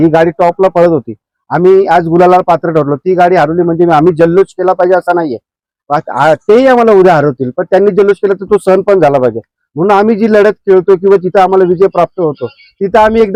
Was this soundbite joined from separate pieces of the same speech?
no; 0 cuts

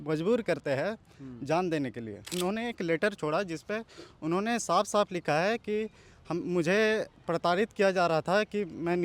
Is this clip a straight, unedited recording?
no; 1 cut; at 2.2 s

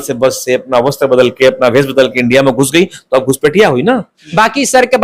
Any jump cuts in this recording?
no; 0 cuts

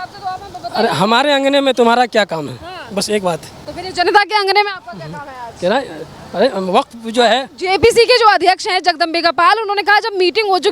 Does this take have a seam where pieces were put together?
no; 0 cuts

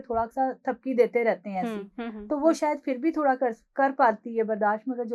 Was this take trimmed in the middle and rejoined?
no; 0 cuts

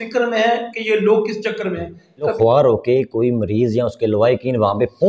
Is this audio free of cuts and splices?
no; 1 cut; at 2.3 s

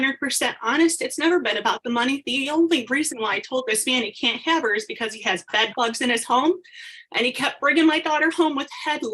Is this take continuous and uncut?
yes; 0 cuts

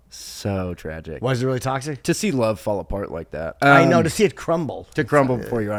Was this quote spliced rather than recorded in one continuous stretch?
no; 0 cuts

